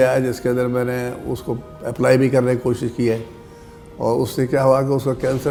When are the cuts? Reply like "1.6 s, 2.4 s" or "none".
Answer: none